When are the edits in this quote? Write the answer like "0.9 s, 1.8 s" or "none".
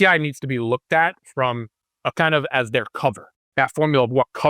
2.0 s, 3.4 s